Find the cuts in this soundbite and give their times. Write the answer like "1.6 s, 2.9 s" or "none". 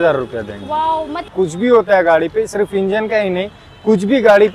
1.2 s